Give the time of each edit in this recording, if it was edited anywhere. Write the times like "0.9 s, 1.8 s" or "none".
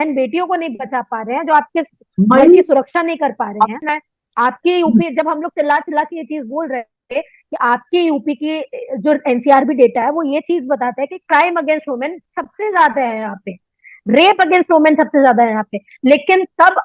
3.8 s

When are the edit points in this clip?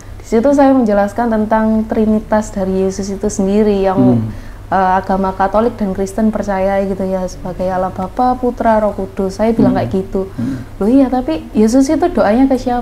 none

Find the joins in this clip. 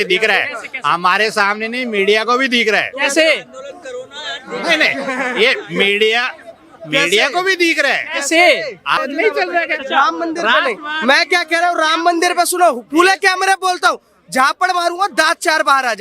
9.0 s

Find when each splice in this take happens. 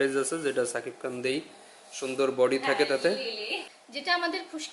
3.6 s

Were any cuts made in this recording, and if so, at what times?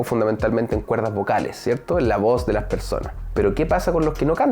3.2 s

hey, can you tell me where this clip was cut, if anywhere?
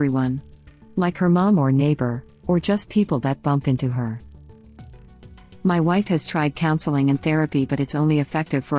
4.9 s

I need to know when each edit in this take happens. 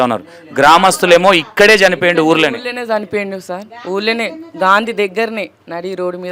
none

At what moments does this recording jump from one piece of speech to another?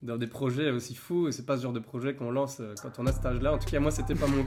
none

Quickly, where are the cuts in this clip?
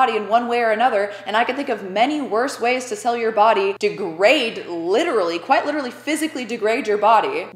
none

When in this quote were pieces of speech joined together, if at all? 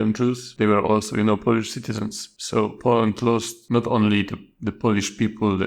none

